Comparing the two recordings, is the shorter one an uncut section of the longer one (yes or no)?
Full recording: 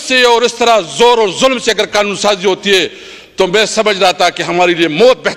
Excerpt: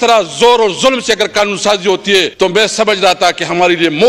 no